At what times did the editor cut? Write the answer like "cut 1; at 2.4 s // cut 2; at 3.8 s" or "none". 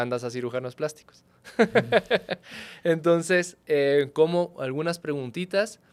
none